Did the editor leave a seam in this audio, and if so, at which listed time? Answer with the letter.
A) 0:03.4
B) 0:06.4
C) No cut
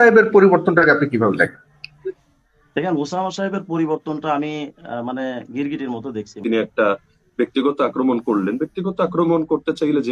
B